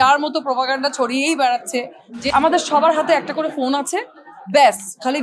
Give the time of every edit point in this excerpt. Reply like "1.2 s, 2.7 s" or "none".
2.2 s